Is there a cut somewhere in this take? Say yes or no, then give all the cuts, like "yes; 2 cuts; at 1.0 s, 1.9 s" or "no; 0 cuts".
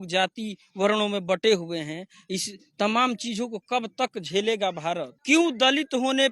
yes; 1 cut; at 5.1 s